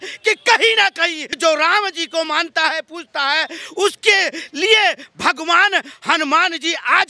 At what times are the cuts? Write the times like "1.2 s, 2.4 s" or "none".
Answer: 1.3 s